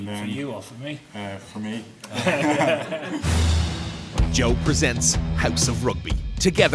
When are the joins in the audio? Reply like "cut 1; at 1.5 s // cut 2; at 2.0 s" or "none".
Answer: cut 1; at 3.1 s

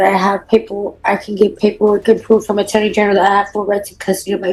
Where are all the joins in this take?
none

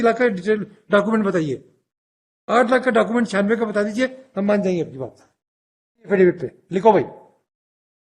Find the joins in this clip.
cut 1; at 6.1 s

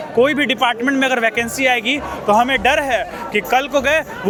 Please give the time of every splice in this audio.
none

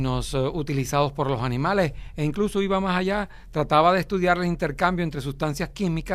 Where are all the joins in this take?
cut 1; at 1.0 s

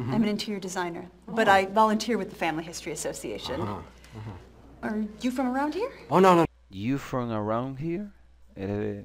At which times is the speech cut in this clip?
none

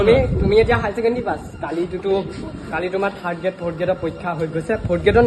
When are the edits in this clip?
none

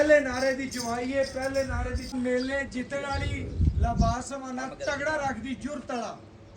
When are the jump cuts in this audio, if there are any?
cut 1; at 2.1 s

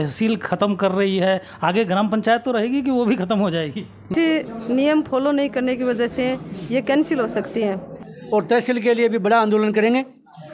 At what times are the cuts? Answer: cut 1; at 4.1 s // cut 2; at 8.1 s

